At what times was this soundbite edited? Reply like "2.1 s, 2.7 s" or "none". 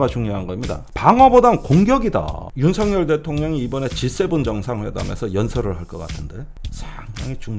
2.4 s